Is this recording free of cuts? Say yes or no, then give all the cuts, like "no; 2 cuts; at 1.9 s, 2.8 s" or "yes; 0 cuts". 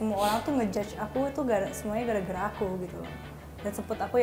yes; 0 cuts